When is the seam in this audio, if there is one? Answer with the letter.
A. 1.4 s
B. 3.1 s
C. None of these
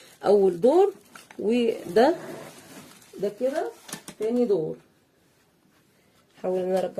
C